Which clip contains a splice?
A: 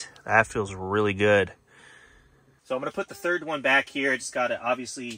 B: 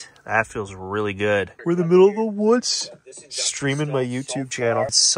B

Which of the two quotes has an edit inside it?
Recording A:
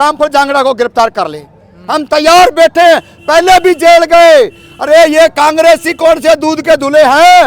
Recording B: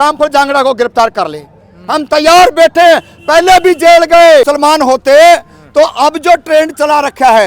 B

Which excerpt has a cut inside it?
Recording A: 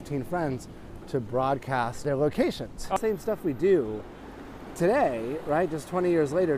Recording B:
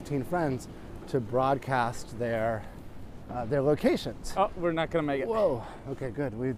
A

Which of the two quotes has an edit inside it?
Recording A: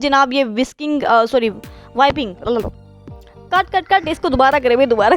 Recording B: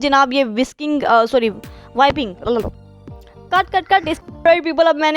B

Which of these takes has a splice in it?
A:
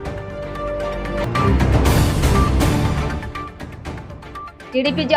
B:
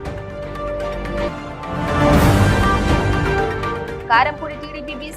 A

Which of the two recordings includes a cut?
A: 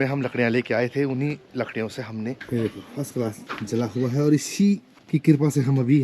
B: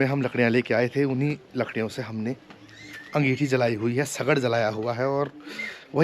A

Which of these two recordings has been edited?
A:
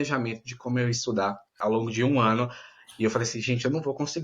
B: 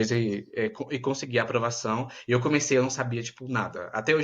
A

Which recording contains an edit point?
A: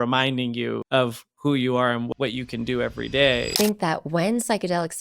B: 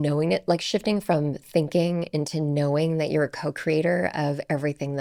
A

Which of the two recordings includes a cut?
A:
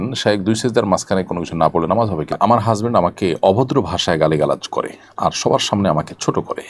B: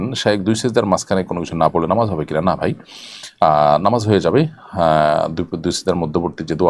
A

